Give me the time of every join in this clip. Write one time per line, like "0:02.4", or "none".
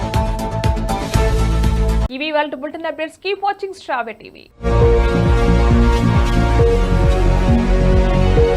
none